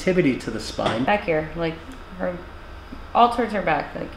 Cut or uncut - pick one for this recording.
cut